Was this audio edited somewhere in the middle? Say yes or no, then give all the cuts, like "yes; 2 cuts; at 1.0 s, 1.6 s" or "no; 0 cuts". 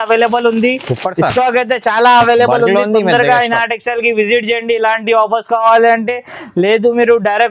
no; 0 cuts